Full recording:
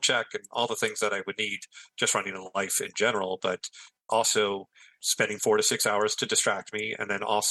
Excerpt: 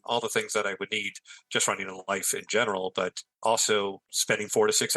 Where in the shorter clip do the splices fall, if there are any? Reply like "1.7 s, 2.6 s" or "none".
3.2 s, 4.1 s